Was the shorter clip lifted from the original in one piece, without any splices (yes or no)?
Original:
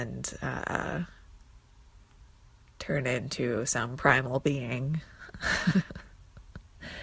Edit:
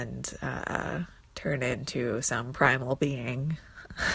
no